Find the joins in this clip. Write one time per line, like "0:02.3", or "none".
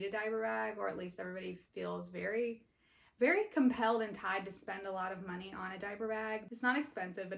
0:06.5

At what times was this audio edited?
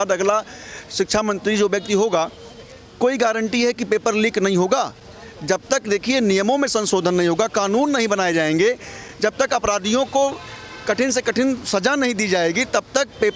none

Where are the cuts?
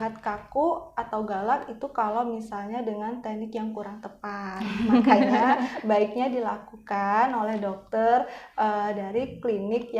none

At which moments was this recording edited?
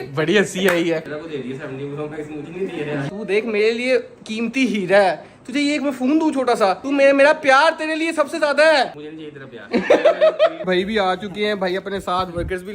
0:01.1
0:03.1
0:10.6

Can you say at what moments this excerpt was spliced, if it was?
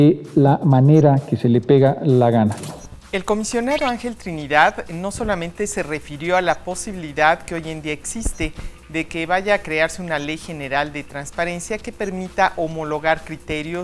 none

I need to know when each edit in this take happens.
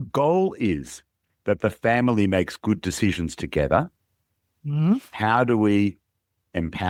none

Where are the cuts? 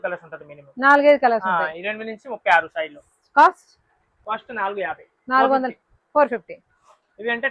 none

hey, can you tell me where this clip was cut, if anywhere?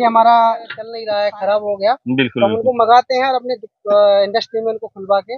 0:01.0

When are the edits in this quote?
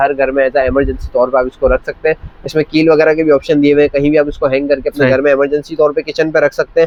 none

